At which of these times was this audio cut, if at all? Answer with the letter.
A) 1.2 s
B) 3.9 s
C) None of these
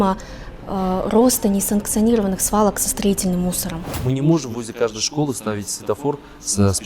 B